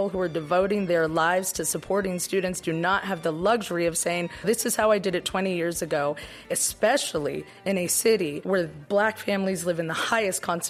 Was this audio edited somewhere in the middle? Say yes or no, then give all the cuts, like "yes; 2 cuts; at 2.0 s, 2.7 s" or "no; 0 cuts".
no; 0 cuts